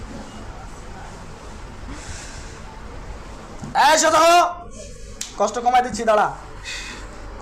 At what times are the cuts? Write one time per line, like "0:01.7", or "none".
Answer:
none